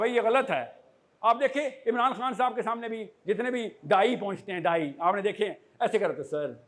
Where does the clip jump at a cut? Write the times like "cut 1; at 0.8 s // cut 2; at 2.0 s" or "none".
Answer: none